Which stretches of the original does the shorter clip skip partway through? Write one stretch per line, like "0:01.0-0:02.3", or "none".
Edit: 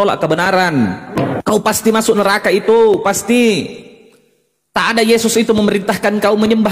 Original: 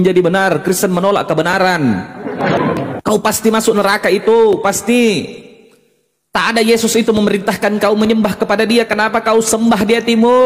0:02.2-0:02.7